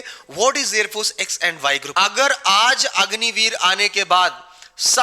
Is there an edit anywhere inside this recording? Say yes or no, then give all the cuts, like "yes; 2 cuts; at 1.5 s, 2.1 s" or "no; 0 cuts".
yes; 1 cut; at 1.8 s